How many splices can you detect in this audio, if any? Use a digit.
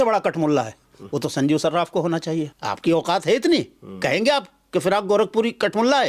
1